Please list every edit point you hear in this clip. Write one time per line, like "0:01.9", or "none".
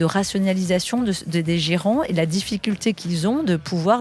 none